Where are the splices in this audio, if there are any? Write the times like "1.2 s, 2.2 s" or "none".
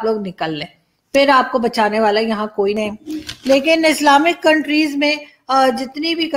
2.8 s